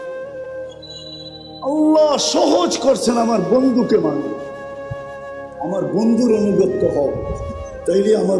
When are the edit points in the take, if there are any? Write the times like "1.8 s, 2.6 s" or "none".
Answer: none